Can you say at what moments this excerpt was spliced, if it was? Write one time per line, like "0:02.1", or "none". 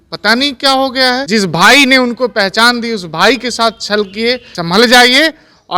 0:01.2
0:04.5